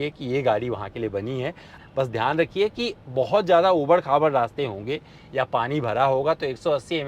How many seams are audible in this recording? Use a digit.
1